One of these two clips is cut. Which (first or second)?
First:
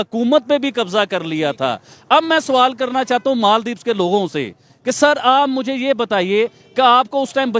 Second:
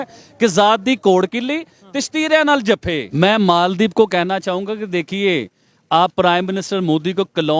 second